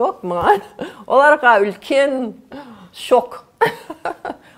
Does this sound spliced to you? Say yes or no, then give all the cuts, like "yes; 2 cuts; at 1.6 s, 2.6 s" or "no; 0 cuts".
no; 0 cuts